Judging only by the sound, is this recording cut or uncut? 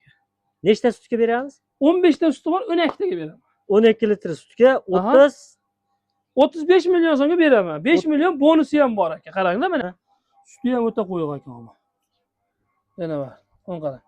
cut